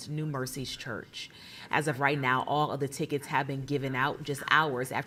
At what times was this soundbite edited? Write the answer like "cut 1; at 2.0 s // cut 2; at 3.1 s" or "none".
none